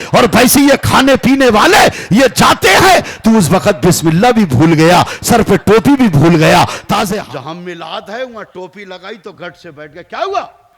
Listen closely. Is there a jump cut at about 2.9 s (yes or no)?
no